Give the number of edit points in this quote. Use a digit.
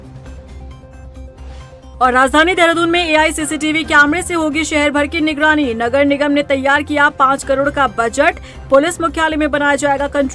1